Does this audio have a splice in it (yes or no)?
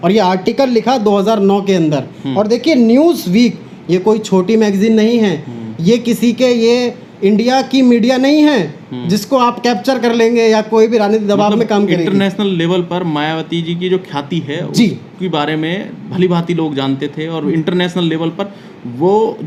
no